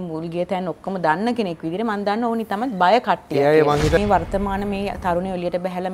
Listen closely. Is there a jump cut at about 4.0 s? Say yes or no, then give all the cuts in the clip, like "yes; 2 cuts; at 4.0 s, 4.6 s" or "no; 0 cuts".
yes; 1 cut; at 4.0 s